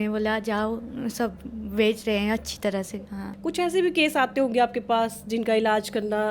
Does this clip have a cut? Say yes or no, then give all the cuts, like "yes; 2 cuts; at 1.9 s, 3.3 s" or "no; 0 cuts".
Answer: yes; 1 cut; at 3.2 s